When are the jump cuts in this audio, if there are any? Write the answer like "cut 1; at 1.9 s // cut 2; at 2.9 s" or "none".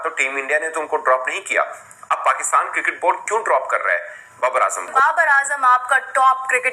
cut 1; at 4.9 s